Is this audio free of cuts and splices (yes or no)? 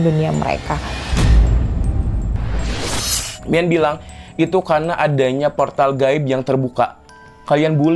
no